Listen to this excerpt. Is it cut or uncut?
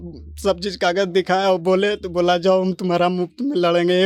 uncut